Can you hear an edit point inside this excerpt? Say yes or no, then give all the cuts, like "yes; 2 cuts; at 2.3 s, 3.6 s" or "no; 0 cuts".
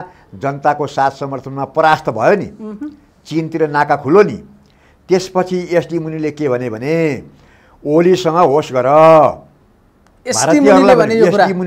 no; 0 cuts